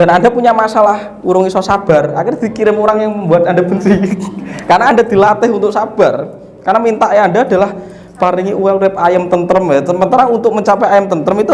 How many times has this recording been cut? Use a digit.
0